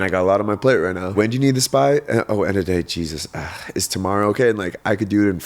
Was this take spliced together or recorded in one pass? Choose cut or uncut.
cut